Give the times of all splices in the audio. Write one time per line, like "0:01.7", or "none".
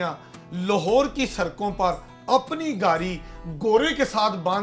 none

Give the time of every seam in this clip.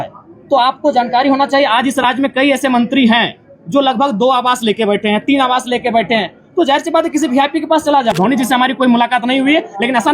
0:08.1

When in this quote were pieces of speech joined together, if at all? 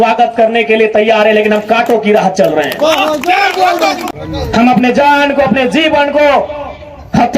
0:04.1

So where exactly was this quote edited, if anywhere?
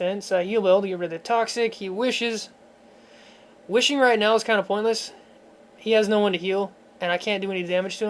0:01.7

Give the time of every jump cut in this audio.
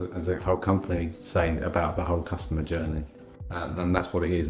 none

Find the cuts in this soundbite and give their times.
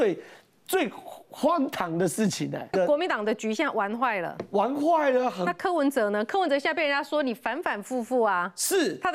0:02.7

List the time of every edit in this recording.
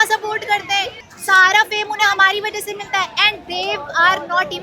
0:01.0

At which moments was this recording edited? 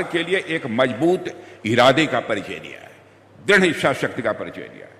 none

